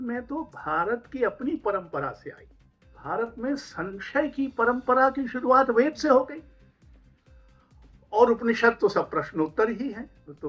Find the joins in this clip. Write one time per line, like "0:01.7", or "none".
0:02.9